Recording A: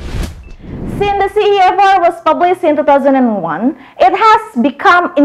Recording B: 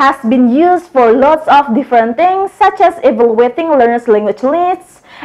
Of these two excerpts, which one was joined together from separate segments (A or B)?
A